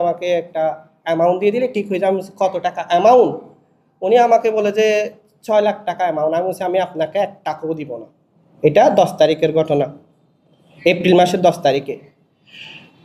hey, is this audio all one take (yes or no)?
yes